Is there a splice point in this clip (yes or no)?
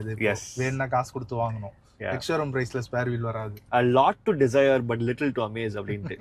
yes